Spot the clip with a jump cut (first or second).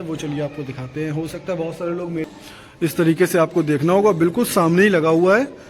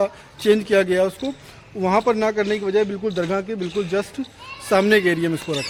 first